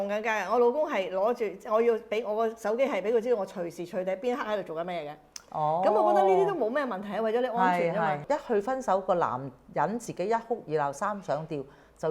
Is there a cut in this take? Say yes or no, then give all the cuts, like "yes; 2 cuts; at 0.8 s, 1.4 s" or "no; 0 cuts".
yes; 1 cut; at 8.2 s